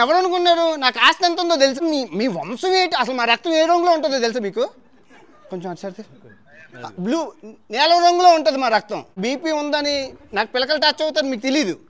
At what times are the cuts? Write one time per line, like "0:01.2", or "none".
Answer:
0:01.8
0:09.2